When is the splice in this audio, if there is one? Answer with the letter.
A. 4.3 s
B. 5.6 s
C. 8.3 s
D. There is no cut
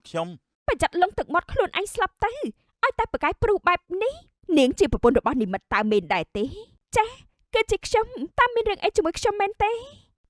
A